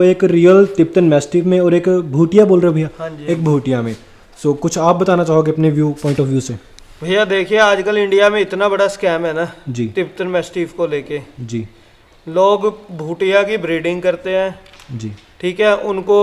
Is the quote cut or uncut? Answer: uncut